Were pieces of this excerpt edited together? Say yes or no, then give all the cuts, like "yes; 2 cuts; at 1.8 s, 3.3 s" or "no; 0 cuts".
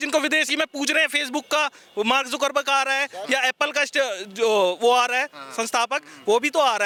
no; 0 cuts